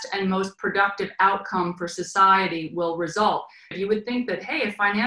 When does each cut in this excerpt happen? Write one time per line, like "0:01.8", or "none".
0:03.7